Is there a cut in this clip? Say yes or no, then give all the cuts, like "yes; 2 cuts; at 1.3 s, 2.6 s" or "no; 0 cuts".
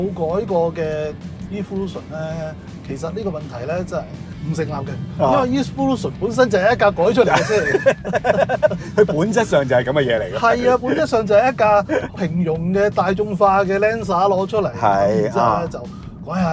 no; 0 cuts